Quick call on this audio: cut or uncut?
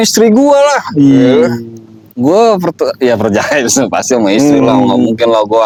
uncut